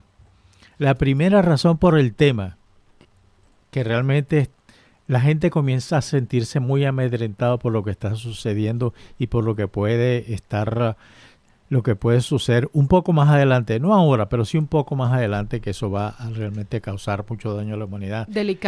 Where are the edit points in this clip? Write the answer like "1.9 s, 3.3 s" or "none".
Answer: none